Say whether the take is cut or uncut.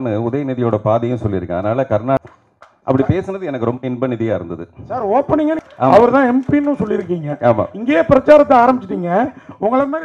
cut